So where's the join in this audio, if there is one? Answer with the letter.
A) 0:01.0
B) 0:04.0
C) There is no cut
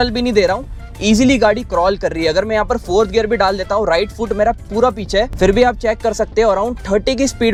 C